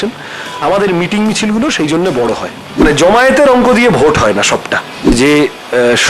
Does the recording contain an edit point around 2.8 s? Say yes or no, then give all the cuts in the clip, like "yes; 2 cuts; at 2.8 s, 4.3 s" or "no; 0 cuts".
yes; 2 cuts; at 2.8 s, 5.1 s